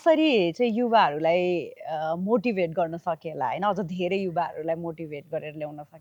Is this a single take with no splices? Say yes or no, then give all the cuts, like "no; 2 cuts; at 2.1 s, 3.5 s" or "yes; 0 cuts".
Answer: yes; 0 cuts